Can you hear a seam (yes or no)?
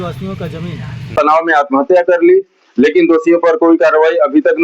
yes